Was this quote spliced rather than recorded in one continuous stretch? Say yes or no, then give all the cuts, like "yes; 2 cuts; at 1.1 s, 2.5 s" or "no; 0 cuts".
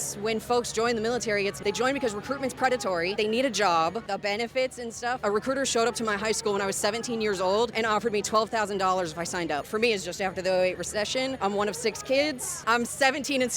yes; 8 cuts; at 1.6 s, 3.2 s, 4.1 s, 5.2 s, 7.7 s, 9.7 s, 11.4 s, 12.5 s